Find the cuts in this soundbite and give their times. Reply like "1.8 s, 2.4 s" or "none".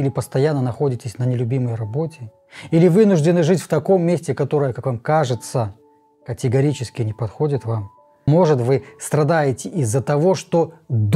8.3 s

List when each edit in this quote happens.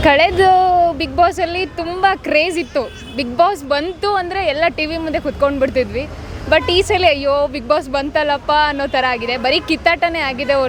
none

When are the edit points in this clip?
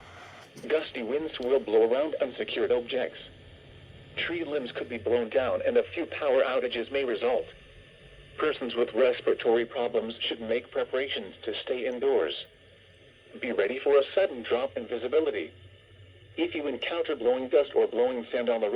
8.2 s

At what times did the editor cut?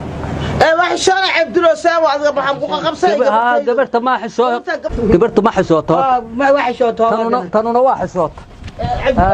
4.8 s

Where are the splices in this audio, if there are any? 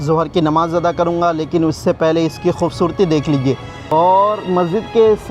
3.7 s

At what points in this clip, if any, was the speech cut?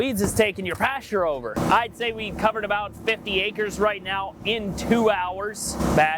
1.5 s

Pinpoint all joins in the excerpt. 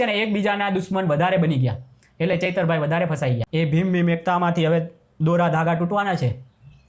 3.4 s

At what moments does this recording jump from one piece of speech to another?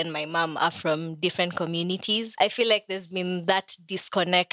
2.3 s

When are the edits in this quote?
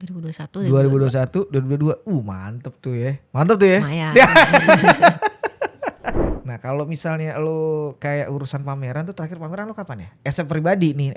6.3 s

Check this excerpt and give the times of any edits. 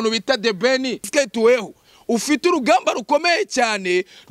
1.0 s

